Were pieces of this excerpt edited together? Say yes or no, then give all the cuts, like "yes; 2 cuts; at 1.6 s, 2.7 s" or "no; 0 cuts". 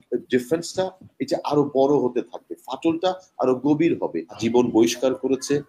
yes; 1 cut; at 4.3 s